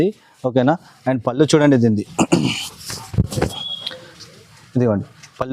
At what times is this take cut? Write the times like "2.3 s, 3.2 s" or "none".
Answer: none